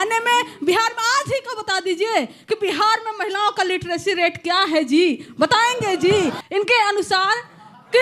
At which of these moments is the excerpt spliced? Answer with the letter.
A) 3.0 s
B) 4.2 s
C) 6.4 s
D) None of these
C